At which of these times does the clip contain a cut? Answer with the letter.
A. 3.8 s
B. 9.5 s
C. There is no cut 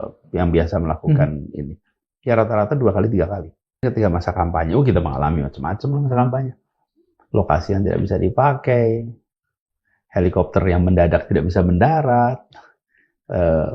A